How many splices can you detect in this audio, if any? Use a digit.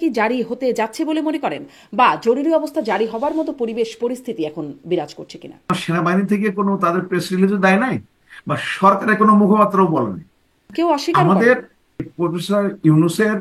3